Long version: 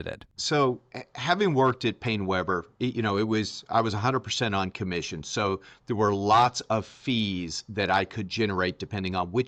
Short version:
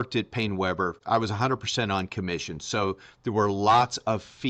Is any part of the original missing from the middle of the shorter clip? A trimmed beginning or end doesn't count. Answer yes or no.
yes